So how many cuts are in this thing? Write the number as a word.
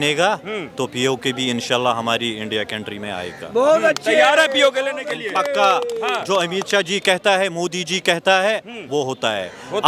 zero